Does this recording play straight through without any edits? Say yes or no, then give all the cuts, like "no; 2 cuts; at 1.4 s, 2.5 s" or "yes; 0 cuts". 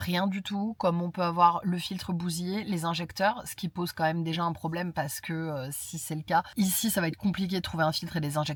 yes; 0 cuts